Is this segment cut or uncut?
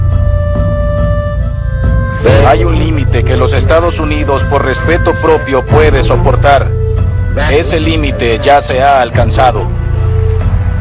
uncut